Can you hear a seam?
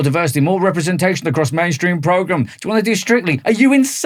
no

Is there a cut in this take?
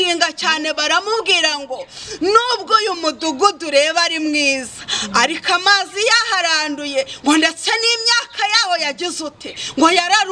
no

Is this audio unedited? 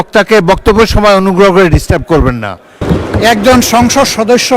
no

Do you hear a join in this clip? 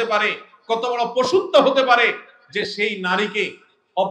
no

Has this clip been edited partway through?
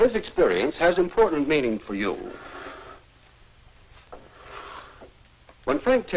no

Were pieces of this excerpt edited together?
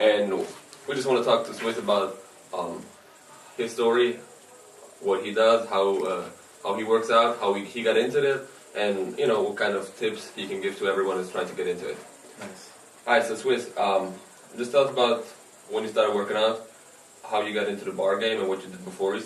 no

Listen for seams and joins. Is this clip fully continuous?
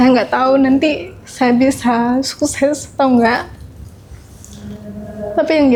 yes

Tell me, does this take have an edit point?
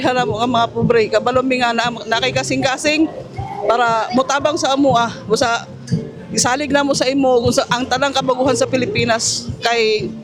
no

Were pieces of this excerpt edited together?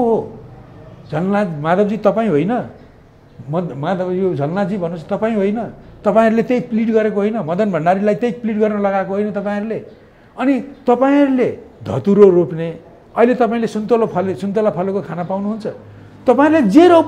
no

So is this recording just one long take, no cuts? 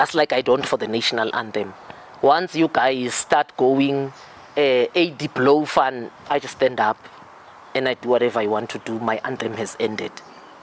yes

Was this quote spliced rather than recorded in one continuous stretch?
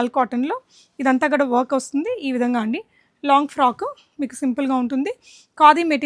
no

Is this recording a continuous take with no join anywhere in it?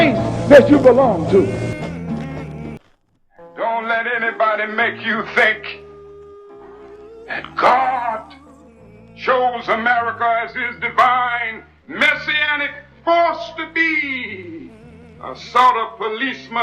no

